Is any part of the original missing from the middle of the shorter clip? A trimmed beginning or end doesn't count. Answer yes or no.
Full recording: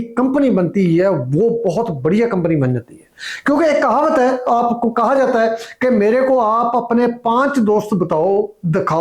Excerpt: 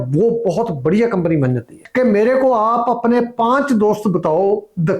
yes